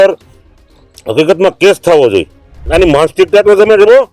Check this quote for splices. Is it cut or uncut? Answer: cut